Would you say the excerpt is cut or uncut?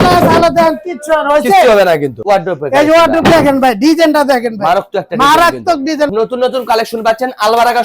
cut